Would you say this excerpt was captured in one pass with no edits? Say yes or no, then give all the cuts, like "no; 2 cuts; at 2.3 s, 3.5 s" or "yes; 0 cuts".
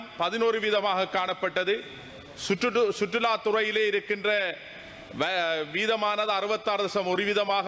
yes; 0 cuts